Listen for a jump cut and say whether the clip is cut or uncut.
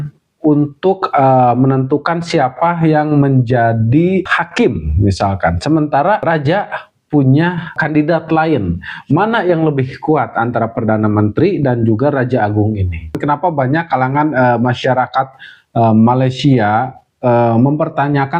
cut